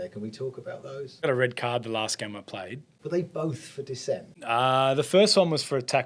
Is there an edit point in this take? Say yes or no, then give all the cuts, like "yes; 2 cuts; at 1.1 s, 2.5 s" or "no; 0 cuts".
yes; 2 cuts; at 1.2 s, 2.9 s